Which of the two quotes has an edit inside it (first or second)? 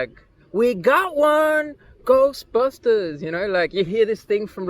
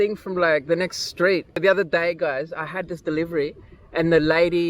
second